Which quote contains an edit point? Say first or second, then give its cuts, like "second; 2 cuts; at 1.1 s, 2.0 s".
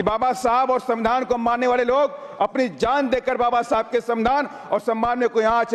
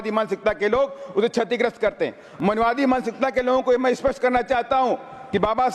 second; 1 cut; at 2.2 s